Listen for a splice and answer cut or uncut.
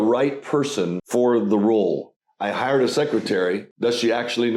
cut